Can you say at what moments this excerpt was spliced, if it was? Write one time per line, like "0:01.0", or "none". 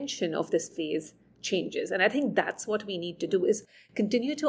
none